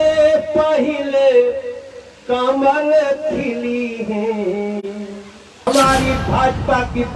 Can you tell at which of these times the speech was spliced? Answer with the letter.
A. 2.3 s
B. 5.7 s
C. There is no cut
B